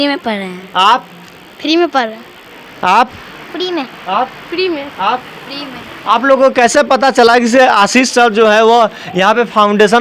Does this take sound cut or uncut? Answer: uncut